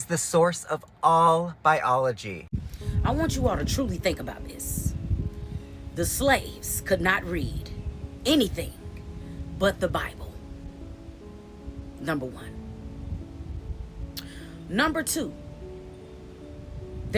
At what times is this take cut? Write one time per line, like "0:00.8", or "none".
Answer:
0:02.5